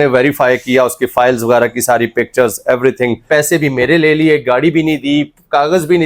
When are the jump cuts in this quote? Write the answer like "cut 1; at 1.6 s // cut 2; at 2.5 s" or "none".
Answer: cut 1; at 3.3 s